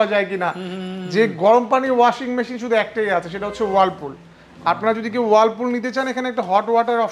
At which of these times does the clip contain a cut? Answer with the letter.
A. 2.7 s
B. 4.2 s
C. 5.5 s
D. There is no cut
D